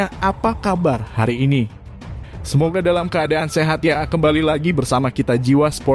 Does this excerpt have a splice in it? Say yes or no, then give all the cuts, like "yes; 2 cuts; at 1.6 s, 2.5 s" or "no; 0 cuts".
no; 0 cuts